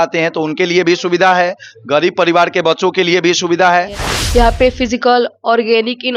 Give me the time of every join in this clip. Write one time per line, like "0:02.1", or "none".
0:04.0